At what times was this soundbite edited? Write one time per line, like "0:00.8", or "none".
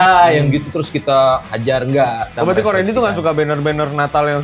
0:02.3